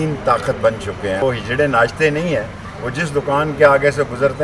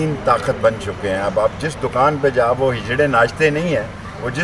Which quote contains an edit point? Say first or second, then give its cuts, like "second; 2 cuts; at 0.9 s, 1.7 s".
first; 1 cut; at 1.2 s